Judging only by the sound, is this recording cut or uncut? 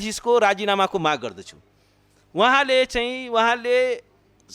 uncut